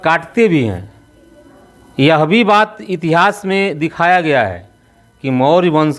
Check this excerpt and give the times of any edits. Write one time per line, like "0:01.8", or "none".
none

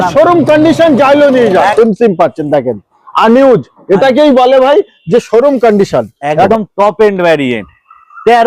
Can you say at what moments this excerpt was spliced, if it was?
0:01.7
0:06.5

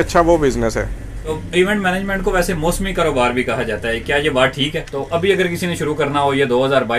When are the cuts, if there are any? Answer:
0:01.3
0:04.9

